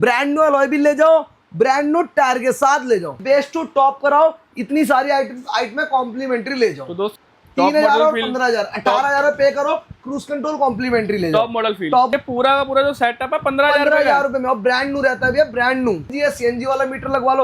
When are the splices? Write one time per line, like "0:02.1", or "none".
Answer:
0:03.2
0:07.1
0:12.1
0:16.1